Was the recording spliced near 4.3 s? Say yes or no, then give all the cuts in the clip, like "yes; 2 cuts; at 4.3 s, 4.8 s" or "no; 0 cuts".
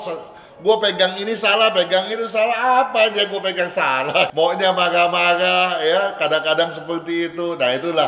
yes; 1 cut; at 4.3 s